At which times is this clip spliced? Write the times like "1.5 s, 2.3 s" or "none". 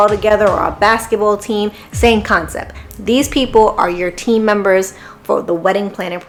none